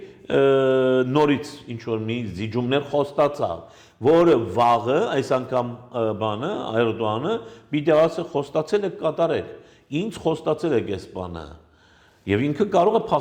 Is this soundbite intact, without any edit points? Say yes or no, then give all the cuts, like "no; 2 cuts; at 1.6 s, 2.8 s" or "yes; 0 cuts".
yes; 0 cuts